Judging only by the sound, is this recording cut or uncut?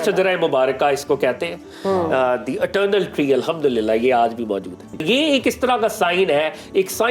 cut